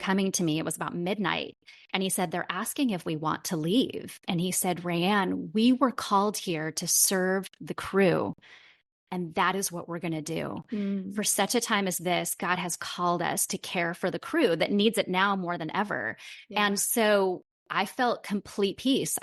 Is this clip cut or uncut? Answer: uncut